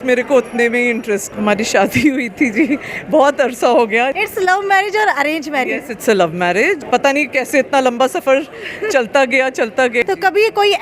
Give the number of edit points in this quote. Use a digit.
4